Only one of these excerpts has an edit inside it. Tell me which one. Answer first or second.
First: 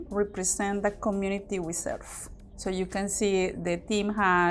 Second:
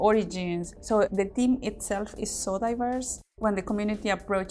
second